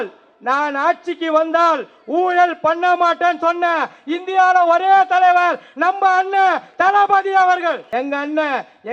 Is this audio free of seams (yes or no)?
no